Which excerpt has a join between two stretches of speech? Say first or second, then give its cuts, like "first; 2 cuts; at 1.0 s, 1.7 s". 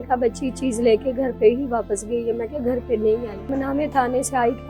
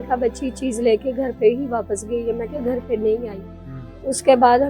first; 1 cut; at 3.6 s